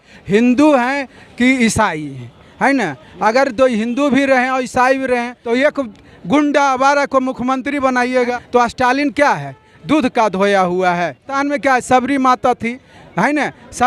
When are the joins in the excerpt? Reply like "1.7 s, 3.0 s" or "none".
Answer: 5.4 s, 8.3 s, 11.3 s

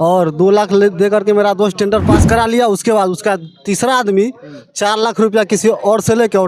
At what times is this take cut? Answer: none

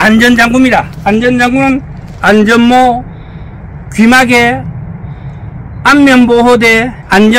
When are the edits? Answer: none

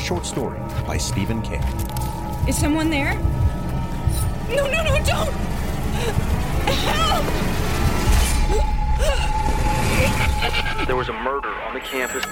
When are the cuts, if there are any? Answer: none

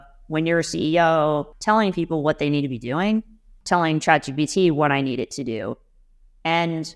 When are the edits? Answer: 1.5 s, 3.5 s

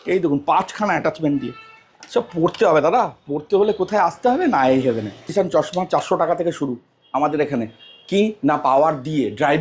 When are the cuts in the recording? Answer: 5.3 s

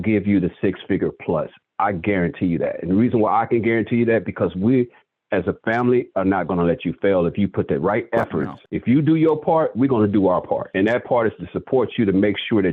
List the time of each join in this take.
none

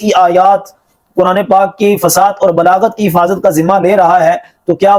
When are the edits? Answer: none

